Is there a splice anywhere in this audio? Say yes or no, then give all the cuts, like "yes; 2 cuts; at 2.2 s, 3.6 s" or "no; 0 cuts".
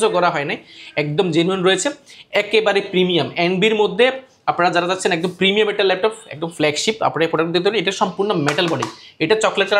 no; 0 cuts